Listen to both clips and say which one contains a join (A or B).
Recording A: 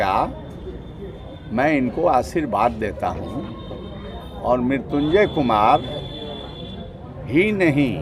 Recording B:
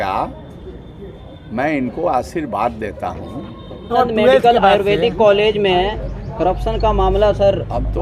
B